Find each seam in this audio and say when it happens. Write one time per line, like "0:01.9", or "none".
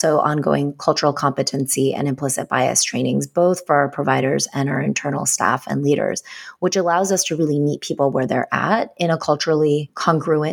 none